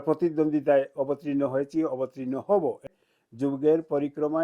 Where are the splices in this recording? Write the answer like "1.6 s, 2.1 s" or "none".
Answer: 2.9 s